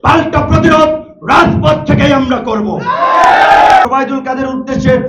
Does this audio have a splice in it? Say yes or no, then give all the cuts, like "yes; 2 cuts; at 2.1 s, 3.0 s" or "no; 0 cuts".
yes; 1 cut; at 3.9 s